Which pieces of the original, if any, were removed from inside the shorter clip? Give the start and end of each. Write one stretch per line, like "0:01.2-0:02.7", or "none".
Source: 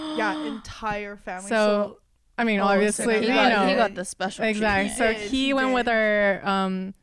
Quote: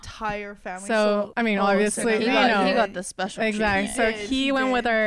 0:01.9-0:02.3